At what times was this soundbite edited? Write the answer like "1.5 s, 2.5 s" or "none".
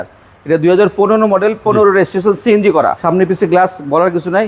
3.0 s